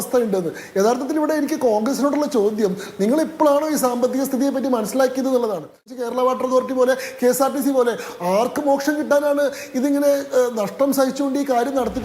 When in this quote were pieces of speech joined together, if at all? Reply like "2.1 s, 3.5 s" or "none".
5.9 s